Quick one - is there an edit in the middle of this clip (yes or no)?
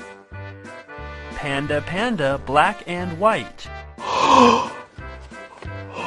yes